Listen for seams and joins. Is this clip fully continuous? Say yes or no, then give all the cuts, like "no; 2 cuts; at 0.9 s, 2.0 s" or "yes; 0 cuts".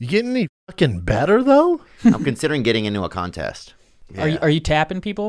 no; 1 cut; at 4.0 s